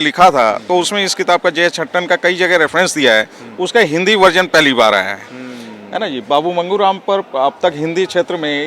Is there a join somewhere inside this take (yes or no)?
no